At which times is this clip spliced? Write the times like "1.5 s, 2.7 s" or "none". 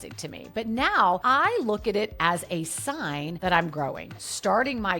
1.2 s, 4.2 s